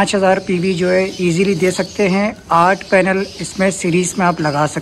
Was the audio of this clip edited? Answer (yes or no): no